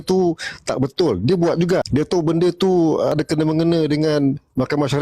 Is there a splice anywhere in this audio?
yes; 2 cuts; at 1.9 s, 3.1 s

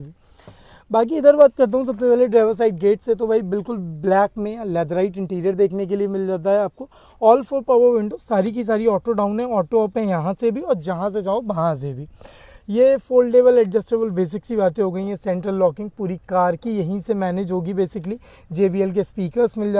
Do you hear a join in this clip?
no; 0 cuts

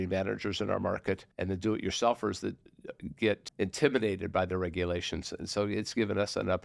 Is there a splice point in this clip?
yes; 2 cuts; at 1.3 s, 3.5 s

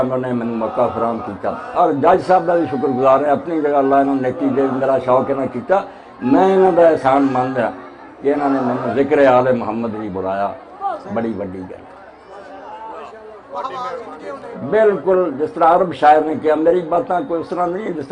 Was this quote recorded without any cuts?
no; 1 cut; at 5.0 s

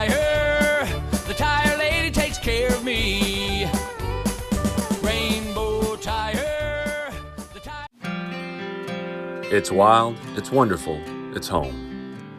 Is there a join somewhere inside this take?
yes; 1 cut; at 7.9 s

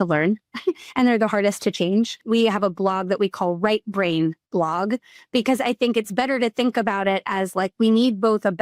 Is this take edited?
yes; 1 cut; at 2.2 s

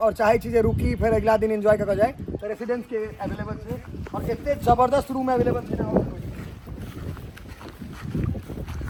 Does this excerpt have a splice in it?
no; 0 cuts

